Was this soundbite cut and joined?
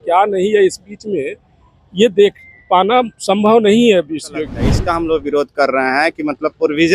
yes; 1 cut; at 4.6 s

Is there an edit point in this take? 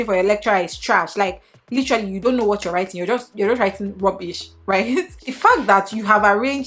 yes; 1 cut; at 5.2 s

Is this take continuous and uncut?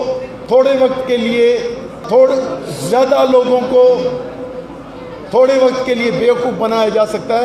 yes; 0 cuts

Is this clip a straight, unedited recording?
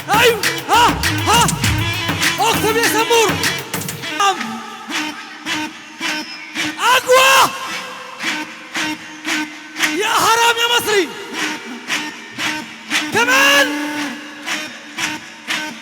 no; 1 cut; at 4.2 s

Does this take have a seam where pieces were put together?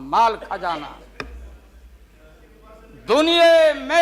no; 0 cuts

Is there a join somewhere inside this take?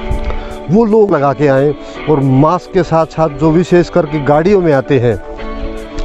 yes; 1 cut; at 1.1 s

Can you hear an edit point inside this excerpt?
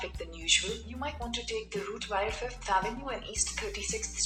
no; 0 cuts

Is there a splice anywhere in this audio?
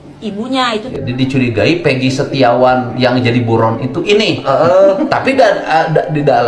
yes; 1 cut; at 0.9 s

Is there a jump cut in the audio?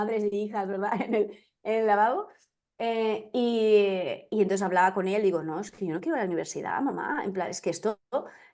no; 0 cuts

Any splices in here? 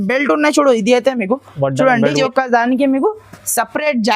yes; 1 cut; at 2.2 s

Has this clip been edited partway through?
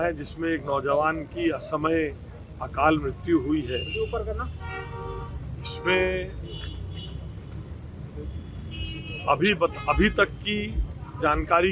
no; 0 cuts

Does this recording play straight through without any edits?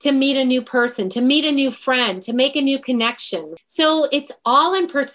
no; 1 cut; at 3.5 s

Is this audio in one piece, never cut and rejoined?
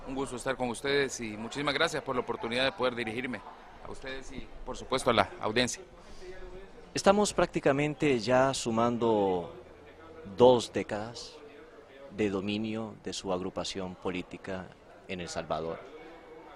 yes; 0 cuts

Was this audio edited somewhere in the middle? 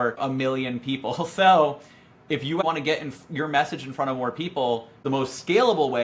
yes; 2 cuts; at 2.6 s, 5.0 s

